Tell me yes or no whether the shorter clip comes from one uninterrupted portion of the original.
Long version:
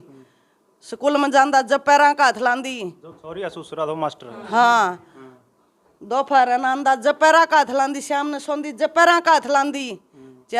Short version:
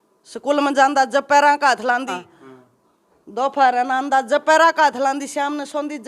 no